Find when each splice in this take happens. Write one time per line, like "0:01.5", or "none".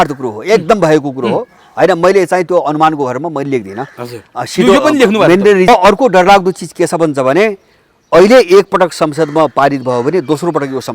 0:05.7

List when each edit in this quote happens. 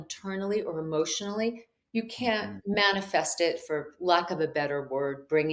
none

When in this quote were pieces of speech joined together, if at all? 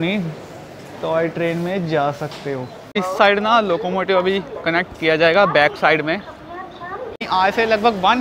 0:03.0
0:07.2

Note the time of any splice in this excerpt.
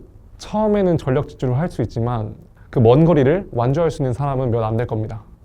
none

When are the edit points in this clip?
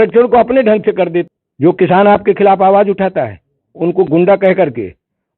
0:01.3

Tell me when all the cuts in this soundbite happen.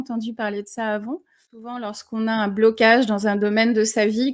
0:01.8

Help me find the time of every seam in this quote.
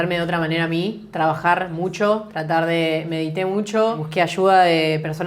0:04.0

